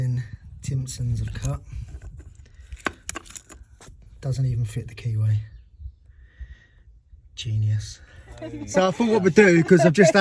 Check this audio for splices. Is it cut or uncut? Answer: cut